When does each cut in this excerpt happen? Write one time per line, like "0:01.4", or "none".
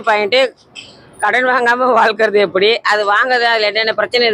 none